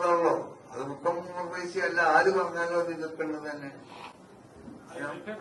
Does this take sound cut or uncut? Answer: uncut